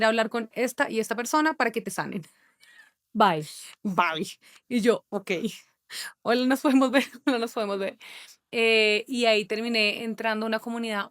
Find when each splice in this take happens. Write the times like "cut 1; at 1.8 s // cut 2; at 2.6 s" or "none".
none